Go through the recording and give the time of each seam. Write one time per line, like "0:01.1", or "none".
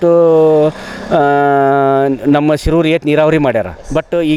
none

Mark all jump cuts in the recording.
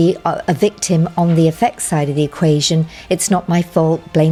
none

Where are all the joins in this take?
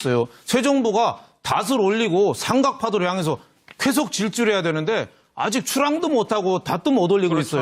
none

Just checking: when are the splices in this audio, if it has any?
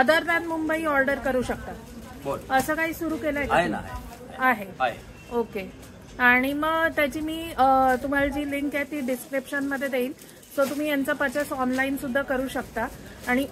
none

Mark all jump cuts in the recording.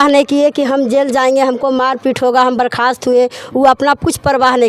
none

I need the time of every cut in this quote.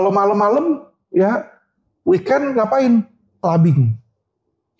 none

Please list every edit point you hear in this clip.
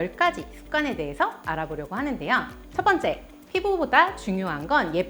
0:02.6

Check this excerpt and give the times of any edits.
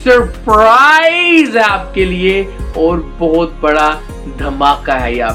none

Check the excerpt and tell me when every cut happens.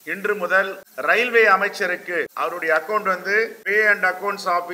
0:00.8
0:02.3
0:03.6

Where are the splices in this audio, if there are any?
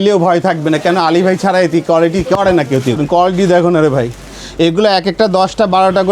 0:03.0

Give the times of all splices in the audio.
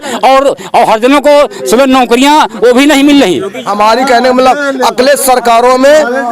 0:03.7

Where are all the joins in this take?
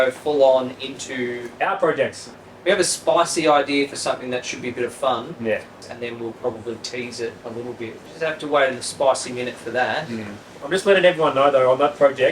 0:02.4
0:05.8
0:08.0

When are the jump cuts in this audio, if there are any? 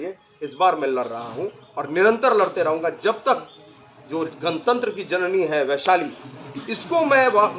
none

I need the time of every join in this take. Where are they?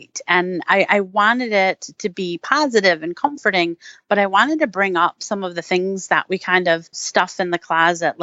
0:07.0

